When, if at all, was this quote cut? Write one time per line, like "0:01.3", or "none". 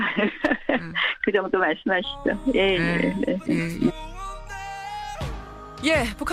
0:03.9